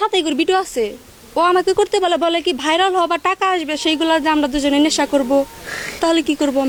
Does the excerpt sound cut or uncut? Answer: uncut